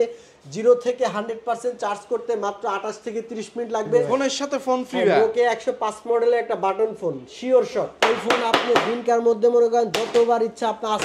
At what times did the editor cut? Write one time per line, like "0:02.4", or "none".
0:04.1
0:07.9